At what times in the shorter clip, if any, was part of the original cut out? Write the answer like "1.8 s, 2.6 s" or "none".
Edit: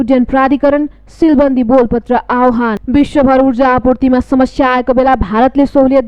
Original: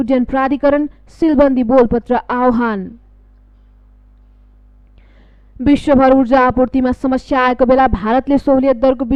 2.8 s